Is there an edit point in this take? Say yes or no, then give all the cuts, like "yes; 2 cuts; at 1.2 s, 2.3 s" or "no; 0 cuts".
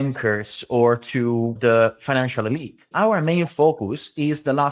yes; 2 cuts; at 1.6 s, 2.9 s